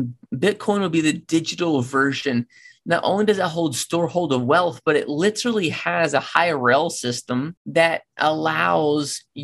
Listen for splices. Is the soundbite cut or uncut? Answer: cut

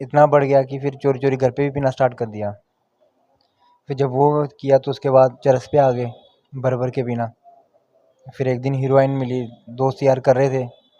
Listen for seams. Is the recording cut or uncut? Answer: uncut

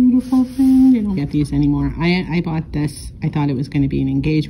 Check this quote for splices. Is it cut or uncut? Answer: cut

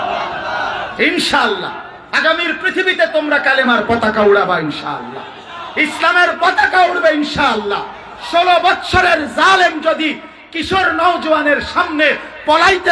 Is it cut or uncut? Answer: uncut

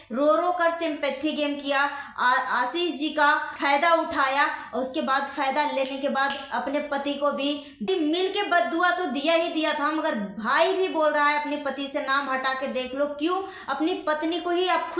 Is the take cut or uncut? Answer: cut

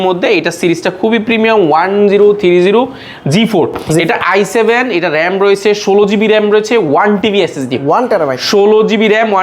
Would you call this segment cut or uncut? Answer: uncut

